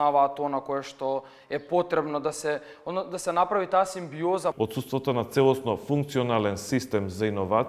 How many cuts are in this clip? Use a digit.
1